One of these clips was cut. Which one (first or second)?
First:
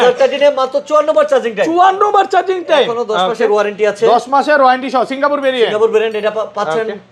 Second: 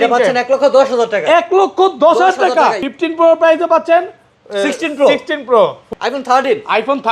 second